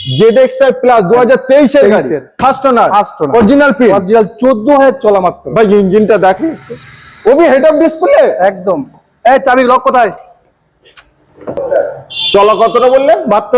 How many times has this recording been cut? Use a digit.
0